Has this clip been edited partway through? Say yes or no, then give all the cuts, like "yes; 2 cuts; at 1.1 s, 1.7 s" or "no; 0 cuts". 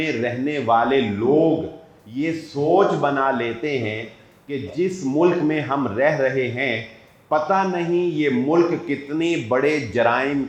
no; 0 cuts